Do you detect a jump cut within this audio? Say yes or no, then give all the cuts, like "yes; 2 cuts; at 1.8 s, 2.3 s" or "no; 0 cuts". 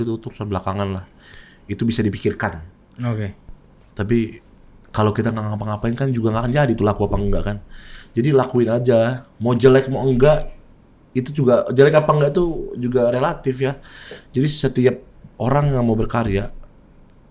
no; 0 cuts